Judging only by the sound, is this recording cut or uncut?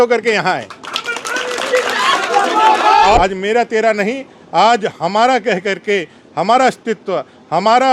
cut